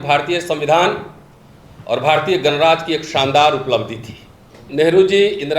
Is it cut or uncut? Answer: cut